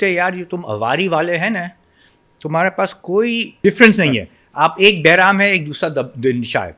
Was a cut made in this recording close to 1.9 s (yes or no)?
no